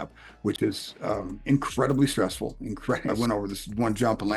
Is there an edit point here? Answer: yes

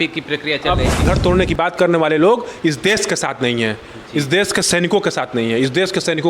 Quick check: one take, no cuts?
no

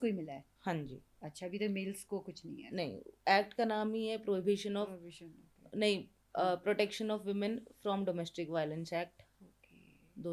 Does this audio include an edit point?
no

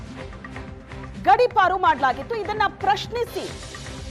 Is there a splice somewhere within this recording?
yes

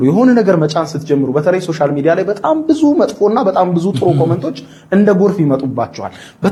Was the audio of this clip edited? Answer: no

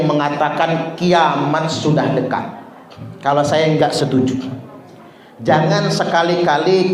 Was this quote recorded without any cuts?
yes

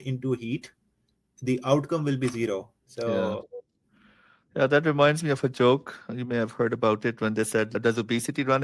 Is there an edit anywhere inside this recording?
yes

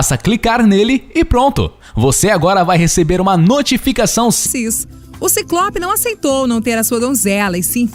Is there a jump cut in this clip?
no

